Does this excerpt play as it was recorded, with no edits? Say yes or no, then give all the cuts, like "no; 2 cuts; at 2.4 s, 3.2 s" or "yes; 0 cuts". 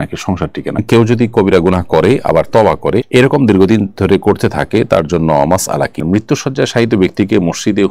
no; 2 cuts; at 0.8 s, 6.0 s